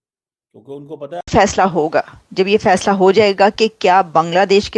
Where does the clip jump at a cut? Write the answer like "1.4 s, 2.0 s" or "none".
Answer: 1.3 s